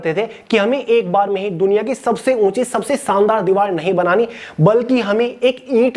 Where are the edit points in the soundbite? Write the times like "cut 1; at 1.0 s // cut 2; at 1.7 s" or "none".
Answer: none

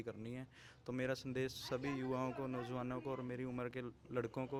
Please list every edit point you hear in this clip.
none

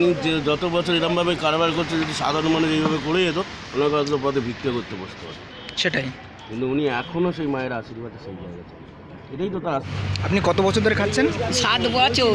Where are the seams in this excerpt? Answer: cut 1; at 9.9 s

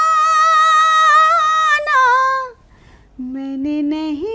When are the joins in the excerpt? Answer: none

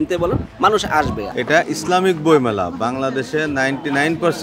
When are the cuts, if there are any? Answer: cut 1; at 1.2 s

